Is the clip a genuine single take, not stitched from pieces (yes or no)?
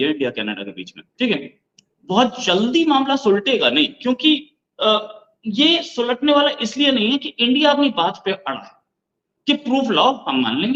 yes